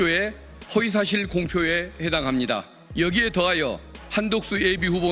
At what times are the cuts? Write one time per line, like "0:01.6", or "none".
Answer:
0:02.8